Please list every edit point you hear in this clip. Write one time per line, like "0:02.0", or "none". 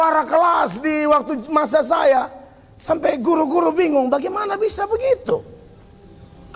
none